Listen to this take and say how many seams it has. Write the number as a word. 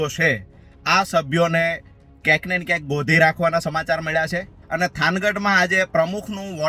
one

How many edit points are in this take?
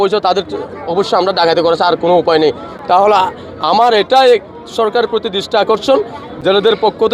zero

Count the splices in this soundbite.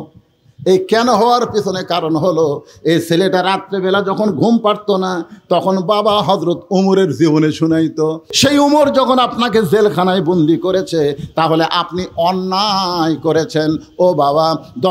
one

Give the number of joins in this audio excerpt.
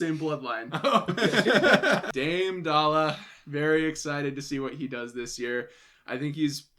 two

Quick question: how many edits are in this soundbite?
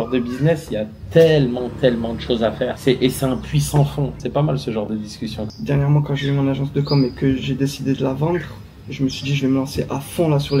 one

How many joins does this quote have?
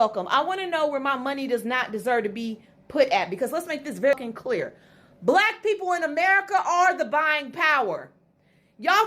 one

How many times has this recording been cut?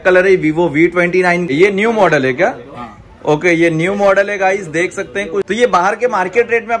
two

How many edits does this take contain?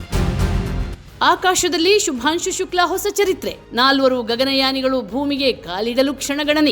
one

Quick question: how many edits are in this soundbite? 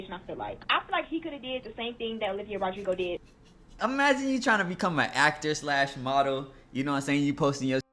one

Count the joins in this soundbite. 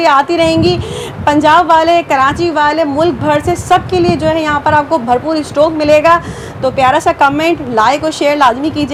zero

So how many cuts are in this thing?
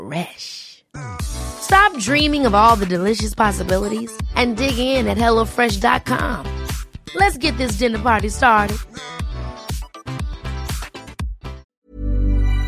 one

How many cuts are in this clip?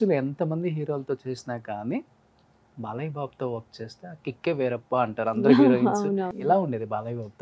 one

